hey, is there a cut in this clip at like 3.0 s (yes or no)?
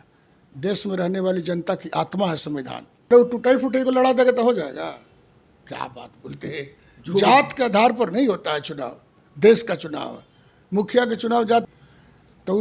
yes